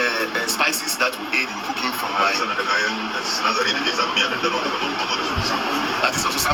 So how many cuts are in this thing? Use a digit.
0